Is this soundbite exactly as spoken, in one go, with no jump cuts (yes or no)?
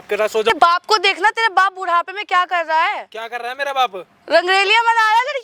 yes